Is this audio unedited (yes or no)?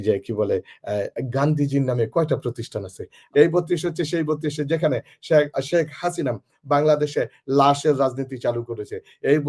no